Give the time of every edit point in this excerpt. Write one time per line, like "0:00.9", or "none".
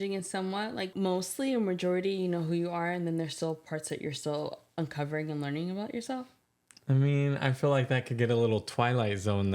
0:00.9